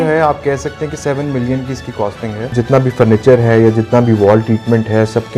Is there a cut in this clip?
yes; 1 cut; at 2.5 s

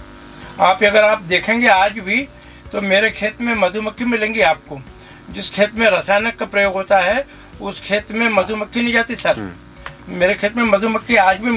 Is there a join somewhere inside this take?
no; 0 cuts

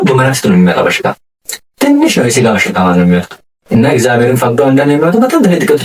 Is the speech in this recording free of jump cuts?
yes; 0 cuts

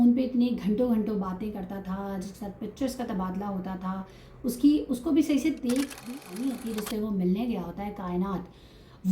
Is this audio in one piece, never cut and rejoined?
no; 1 cut; at 5.9 s

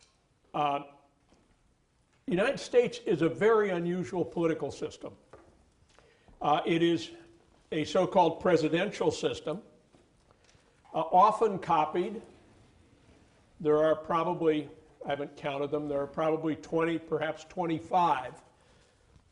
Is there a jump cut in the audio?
yes; 1 cut; at 15.3 s

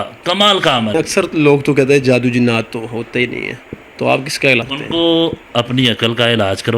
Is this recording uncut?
no; 2 cuts; at 1.0 s, 4.6 s

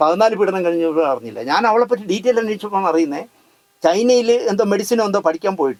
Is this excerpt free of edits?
yes; 0 cuts

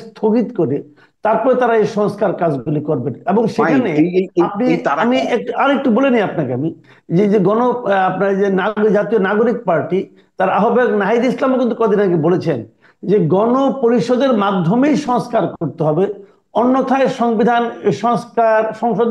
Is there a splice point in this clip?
no; 0 cuts

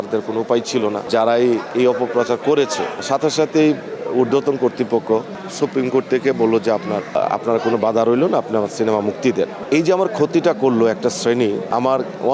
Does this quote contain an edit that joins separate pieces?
no; 0 cuts

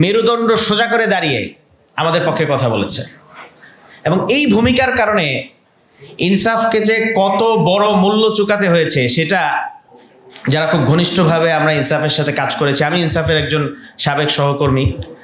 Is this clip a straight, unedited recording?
yes; 0 cuts

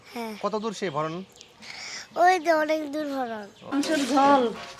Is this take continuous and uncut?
no; 1 cut; at 3.7 s

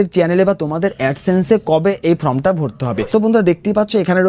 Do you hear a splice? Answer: yes; 1 cut; at 2.9 s

